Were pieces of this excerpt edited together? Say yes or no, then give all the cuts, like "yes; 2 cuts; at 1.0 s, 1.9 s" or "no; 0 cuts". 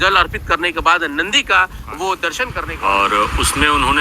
yes; 1 cut; at 2.8 s